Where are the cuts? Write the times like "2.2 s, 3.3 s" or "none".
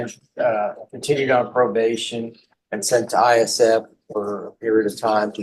none